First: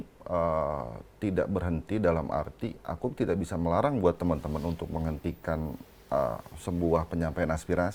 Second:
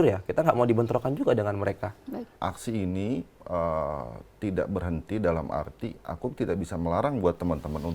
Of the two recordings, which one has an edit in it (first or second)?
second